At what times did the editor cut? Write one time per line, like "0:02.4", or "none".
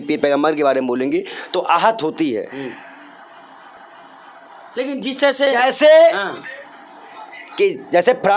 none